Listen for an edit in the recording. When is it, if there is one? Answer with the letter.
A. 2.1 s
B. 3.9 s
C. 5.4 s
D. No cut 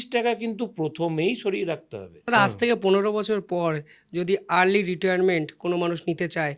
A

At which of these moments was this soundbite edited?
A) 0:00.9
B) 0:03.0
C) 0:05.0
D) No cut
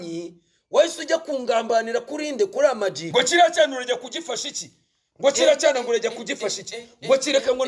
B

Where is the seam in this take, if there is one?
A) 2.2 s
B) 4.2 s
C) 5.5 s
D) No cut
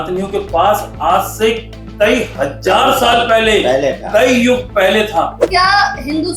C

